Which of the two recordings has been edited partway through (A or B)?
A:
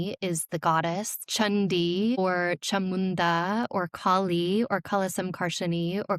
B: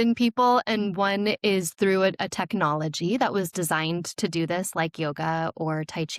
A